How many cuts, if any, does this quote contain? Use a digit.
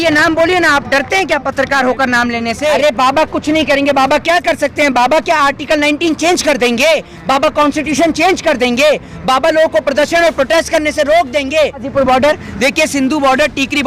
2